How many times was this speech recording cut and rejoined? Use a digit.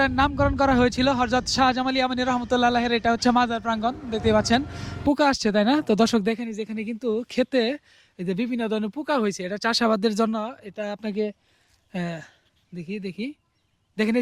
1